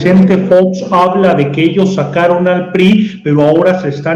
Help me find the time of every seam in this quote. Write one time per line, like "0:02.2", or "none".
none